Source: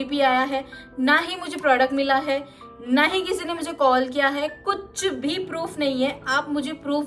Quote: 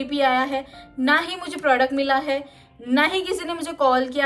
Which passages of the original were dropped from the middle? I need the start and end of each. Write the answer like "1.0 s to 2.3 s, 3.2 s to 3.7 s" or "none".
none